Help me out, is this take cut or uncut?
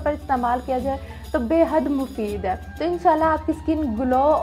cut